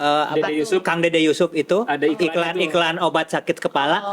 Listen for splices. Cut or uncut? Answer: uncut